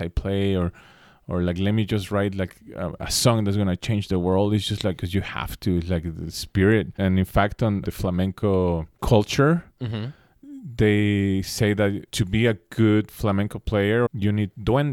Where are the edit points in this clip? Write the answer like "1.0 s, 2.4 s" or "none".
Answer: 5.0 s, 6.9 s, 7.9 s, 9.0 s, 12.1 s, 14.1 s